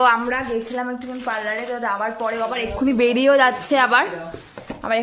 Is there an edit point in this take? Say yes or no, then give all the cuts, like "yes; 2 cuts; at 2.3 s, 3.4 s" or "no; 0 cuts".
no; 0 cuts